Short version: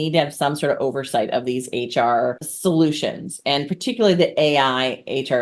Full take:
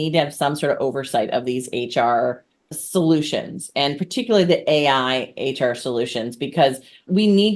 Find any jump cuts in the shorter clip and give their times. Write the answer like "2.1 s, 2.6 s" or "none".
2.5 s